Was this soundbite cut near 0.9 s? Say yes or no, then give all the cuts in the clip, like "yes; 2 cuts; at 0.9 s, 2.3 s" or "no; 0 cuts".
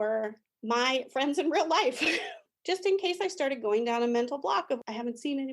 no; 1 cut; at 2.4 s